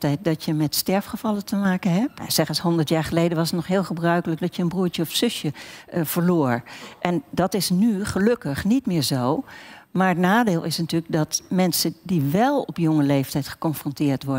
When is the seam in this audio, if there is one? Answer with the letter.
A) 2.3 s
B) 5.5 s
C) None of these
A